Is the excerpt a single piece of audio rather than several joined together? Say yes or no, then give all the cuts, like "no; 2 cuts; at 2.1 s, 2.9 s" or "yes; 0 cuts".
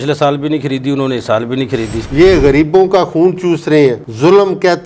no; 1 cut; at 1.9 s